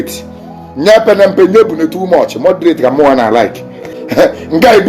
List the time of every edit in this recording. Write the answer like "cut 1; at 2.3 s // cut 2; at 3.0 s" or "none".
cut 1; at 3.8 s

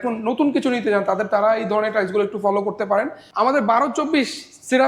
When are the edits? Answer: cut 1; at 3.2 s

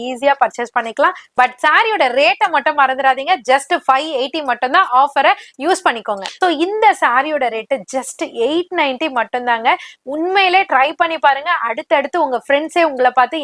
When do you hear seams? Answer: cut 1; at 1.2 s // cut 2; at 6.2 s

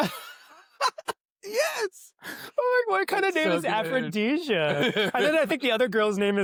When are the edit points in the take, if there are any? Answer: none

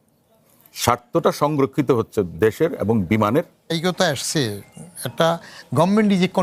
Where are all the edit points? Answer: cut 1; at 3.7 s

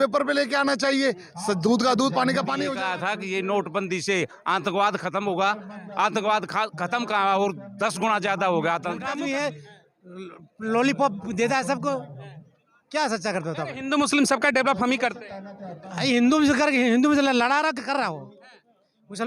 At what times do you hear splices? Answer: cut 1; at 2.7 s // cut 2; at 9.1 s

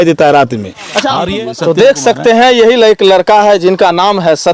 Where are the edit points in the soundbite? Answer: cut 1; at 1.2 s

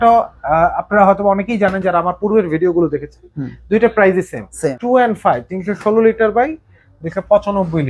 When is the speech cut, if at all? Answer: cut 1; at 4.7 s

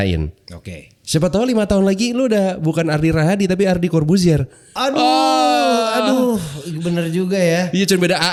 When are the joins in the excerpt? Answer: none

